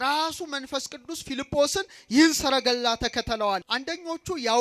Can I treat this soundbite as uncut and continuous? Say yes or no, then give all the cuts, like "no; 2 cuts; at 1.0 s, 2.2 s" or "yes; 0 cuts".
no; 1 cut; at 3.7 s